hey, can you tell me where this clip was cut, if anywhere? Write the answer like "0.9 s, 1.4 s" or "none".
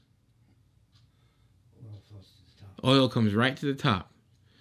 none